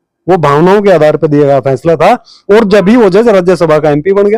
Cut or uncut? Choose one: uncut